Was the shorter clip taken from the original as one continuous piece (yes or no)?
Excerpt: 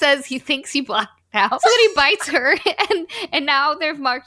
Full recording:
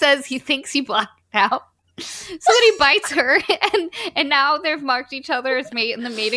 no